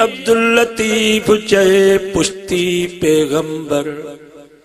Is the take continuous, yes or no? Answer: yes